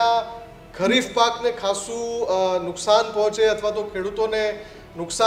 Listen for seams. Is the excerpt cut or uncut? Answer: uncut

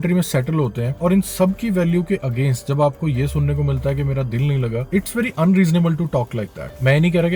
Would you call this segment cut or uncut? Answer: uncut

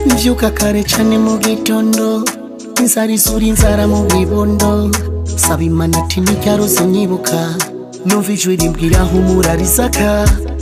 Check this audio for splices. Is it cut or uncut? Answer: uncut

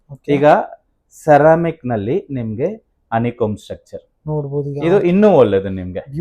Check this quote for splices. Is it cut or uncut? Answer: uncut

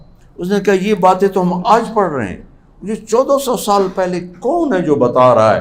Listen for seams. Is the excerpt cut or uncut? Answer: uncut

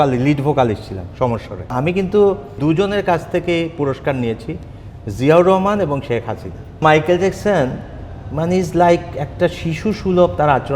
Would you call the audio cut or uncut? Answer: cut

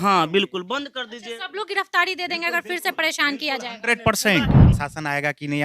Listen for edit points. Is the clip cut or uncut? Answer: cut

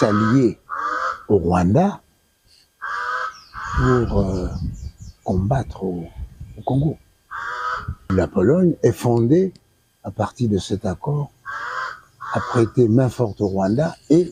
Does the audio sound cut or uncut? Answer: cut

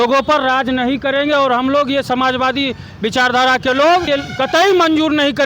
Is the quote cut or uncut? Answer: cut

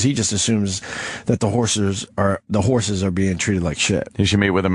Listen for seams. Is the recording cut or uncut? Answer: uncut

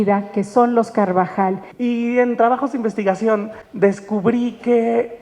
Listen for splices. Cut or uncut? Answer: cut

